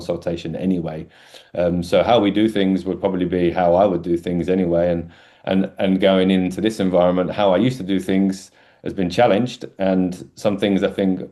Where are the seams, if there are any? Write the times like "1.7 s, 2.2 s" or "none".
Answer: none